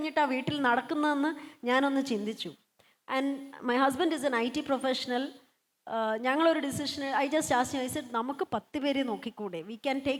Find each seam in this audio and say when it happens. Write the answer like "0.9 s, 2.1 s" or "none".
none